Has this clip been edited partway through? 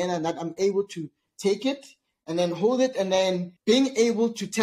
yes; 1 cut; at 3.5 s

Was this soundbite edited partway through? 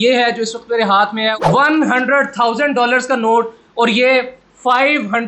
no; 0 cuts

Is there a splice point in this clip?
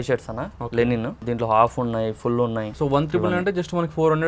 yes; 2 cuts; at 1.2 s, 2.7 s

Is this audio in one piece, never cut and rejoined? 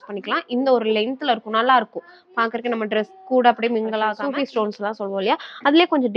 no; 1 cut; at 4.2 s

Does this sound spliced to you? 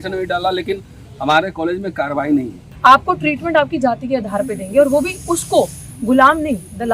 yes; 1 cut; at 2.6 s

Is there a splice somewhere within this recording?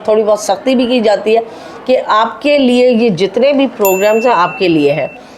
no; 0 cuts

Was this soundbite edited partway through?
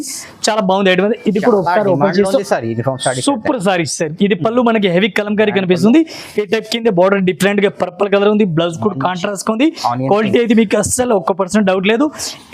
no; 0 cuts

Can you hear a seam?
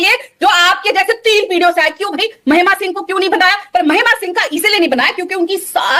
no; 0 cuts

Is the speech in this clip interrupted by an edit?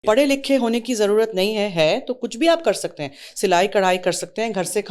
no; 0 cuts

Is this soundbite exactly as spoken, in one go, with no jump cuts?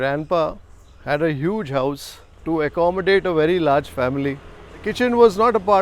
no; 1 cut; at 4.9 s

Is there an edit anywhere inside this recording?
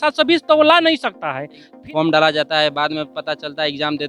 yes; 1 cut; at 1.7 s

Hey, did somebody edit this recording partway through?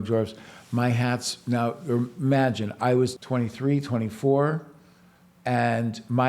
yes; 1 cut; at 3.2 s

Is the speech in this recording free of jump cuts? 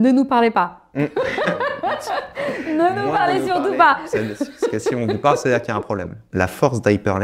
no; 1 cut; at 6.2 s

